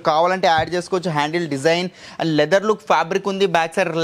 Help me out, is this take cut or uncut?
uncut